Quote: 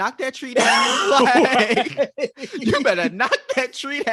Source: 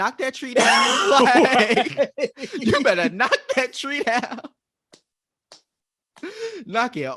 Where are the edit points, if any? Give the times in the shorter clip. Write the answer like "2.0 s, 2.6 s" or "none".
none